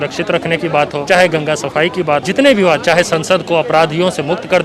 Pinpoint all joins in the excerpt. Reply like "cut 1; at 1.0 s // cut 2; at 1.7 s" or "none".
cut 1; at 1.0 s // cut 2; at 2.2 s